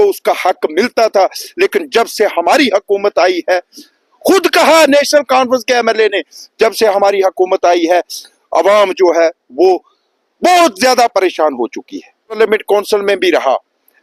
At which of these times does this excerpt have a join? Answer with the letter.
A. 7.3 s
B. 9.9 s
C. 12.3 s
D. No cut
C